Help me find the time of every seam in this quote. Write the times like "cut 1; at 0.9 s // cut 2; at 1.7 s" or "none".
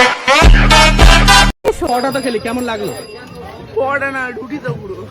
cut 1; at 1.8 s